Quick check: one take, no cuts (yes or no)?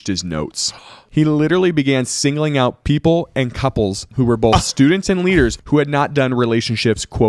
no